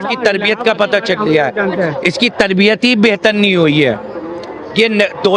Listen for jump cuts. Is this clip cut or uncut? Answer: uncut